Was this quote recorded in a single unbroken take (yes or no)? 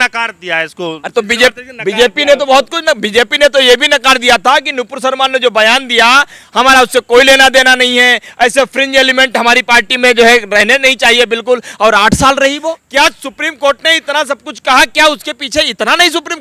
no